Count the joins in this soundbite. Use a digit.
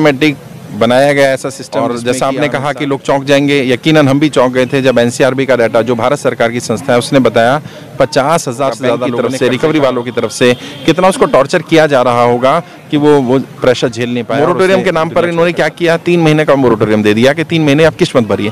3